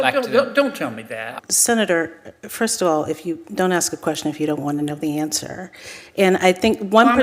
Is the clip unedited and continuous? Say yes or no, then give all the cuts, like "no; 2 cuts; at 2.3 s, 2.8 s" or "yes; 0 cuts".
no; 1 cut; at 1.3 s